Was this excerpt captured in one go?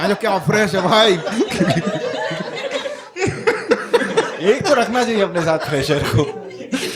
yes; 0 cuts

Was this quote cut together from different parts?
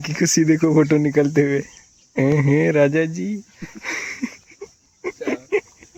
no; 0 cuts

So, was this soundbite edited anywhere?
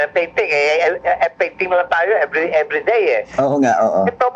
no; 0 cuts

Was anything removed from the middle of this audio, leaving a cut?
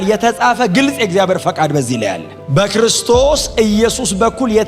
yes; 1 cut; at 2.3 s

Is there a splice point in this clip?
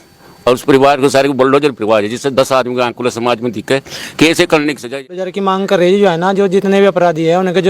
yes; 1 cut; at 5.3 s

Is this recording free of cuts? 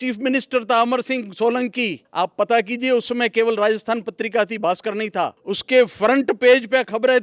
no; 2 cuts; at 2.0 s, 5.4 s

